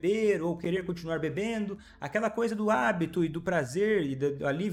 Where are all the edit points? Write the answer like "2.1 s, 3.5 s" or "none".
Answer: none